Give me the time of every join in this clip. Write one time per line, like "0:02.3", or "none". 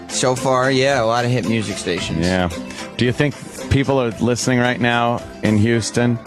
0:03.1